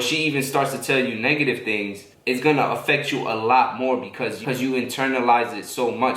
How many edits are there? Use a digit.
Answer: 1